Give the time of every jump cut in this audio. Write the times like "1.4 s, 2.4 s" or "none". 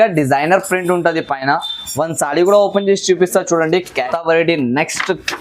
3.9 s